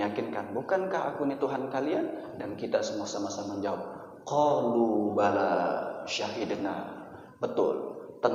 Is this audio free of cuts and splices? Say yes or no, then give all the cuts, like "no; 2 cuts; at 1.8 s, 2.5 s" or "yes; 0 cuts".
yes; 0 cuts